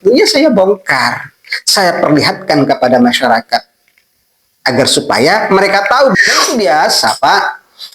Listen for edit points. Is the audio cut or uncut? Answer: cut